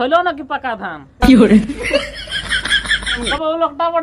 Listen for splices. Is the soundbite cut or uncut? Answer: cut